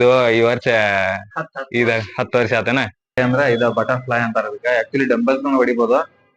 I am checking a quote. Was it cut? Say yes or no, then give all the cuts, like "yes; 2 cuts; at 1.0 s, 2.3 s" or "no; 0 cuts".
yes; 1 cut; at 2.9 s